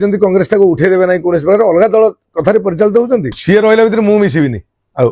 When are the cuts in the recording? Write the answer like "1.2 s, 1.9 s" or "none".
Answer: 3.3 s